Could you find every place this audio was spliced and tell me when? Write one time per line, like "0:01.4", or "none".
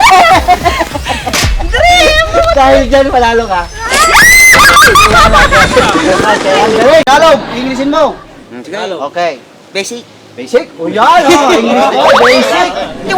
0:07.0